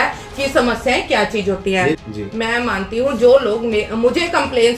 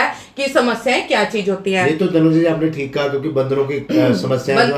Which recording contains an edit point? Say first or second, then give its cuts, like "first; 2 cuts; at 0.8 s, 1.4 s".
first; 1 cut; at 2.0 s